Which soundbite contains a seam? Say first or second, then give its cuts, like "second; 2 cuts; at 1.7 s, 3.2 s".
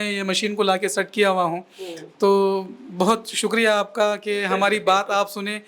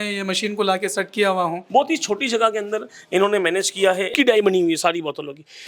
second; 2 cuts; at 1.6 s, 4.1 s